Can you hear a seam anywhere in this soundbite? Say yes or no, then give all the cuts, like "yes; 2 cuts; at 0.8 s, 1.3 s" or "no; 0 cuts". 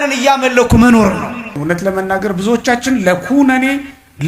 yes; 1 cut; at 1.5 s